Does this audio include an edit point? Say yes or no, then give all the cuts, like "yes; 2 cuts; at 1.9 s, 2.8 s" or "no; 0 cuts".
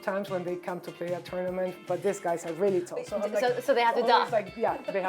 yes; 1 cut; at 1.8 s